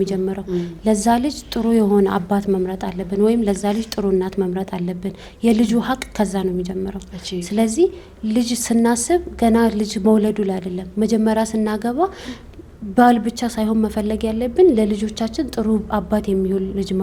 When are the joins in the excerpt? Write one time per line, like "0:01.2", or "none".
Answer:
none